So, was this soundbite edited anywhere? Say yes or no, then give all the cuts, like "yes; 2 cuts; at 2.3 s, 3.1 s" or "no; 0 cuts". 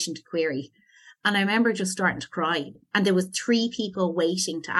yes; 1 cut; at 2.7 s